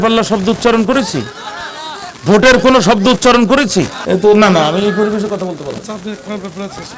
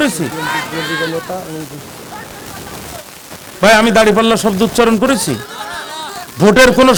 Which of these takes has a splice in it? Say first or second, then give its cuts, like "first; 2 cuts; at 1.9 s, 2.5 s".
first; 1 cut; at 4.0 s